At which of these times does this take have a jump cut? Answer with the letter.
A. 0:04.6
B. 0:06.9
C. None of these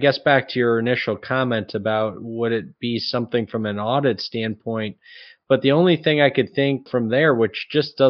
B